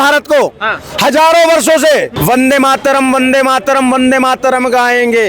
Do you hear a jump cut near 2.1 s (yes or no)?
yes